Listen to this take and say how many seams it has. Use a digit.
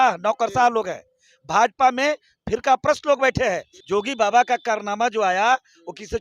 1